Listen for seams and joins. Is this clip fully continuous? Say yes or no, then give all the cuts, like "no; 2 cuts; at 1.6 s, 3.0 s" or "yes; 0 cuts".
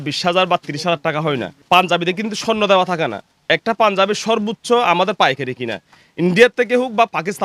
yes; 0 cuts